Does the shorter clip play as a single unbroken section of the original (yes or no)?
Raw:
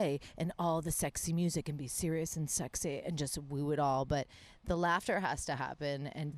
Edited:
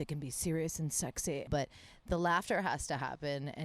no